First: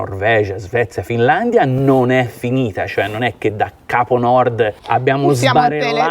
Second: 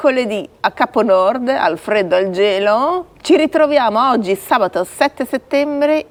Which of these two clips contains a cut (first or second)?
first